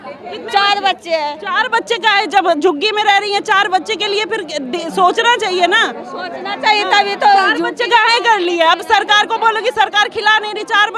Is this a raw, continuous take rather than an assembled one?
yes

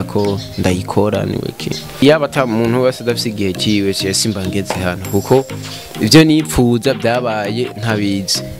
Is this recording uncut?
no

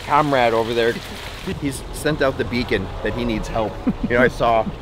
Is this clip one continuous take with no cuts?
no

